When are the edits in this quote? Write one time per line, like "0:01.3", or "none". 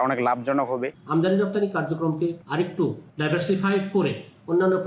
0:00.9
0:02.6